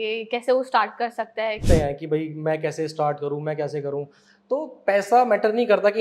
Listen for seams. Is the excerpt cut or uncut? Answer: cut